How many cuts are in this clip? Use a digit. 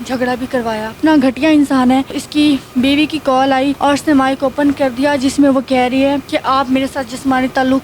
4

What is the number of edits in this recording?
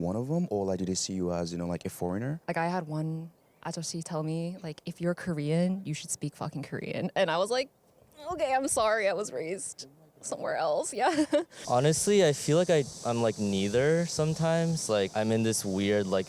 2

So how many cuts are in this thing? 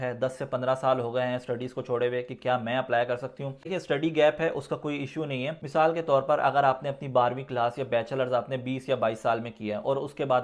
0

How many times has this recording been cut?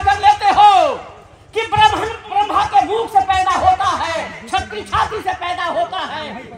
1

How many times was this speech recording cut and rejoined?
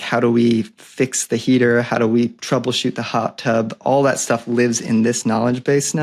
0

